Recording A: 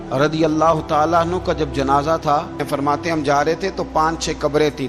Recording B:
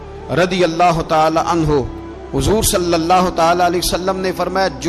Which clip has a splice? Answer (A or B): A